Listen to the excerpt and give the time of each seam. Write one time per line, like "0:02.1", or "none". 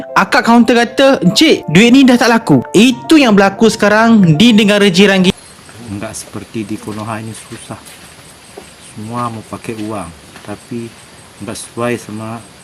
0:05.4

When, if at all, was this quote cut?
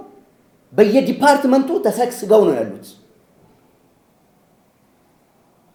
none

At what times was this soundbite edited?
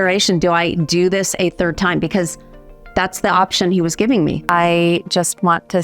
0:04.4

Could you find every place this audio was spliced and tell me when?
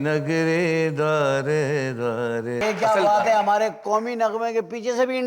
0:02.6

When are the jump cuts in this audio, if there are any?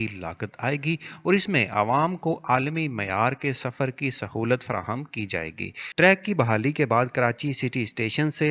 0:05.9

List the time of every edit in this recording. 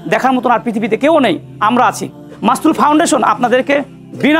0:02.3

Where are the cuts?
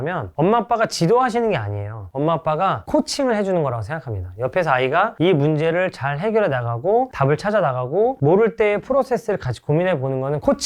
none

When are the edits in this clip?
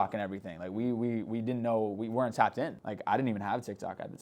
0:02.8

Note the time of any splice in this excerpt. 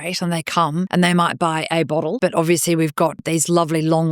0:00.9
0:02.2
0:03.2

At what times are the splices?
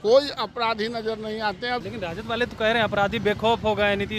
0:01.8

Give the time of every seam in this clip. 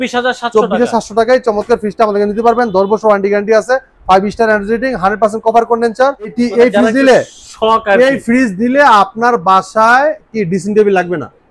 0:06.3

